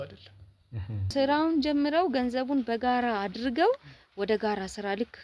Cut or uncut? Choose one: cut